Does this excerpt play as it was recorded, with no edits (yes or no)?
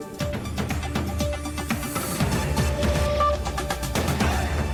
yes